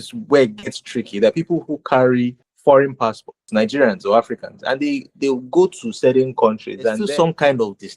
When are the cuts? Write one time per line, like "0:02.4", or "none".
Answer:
0:02.5
0:03.4
0:07.0